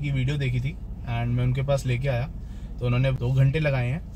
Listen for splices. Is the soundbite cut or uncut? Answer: cut